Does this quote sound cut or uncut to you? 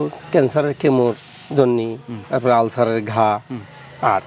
uncut